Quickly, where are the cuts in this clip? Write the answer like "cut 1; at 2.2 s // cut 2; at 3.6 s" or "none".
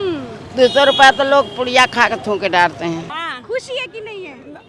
cut 1; at 3.0 s